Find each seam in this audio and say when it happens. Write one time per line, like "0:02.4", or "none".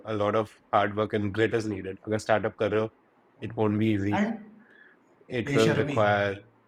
none